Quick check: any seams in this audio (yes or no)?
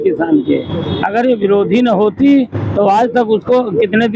no